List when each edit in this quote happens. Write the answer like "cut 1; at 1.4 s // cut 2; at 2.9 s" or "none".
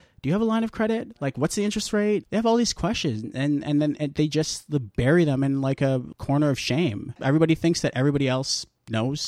cut 1; at 2.3 s // cut 2; at 6.1 s // cut 3; at 7.2 s